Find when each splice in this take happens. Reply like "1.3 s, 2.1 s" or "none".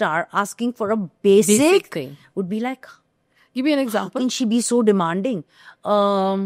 none